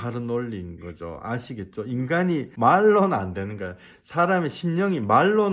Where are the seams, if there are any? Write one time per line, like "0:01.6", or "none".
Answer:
0:02.5

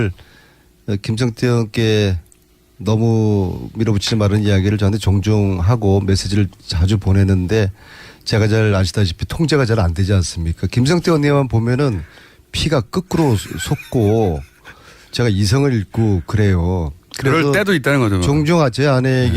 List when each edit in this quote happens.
0:01.3

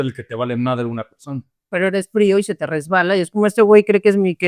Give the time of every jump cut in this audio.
0:01.7

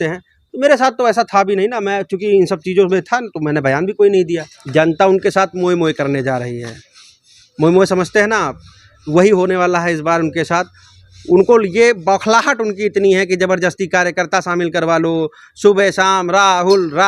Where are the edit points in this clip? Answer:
0:04.5

